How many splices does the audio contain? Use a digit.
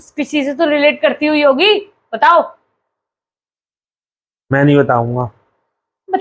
0